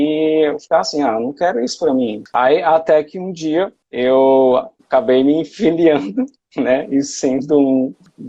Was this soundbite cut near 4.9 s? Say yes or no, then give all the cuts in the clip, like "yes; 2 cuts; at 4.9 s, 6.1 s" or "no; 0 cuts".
no; 1 cut; at 2.2 s